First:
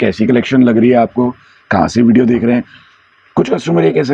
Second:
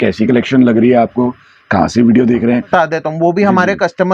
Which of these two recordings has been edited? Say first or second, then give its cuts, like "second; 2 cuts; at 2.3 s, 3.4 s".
second; 1 cut; at 2.7 s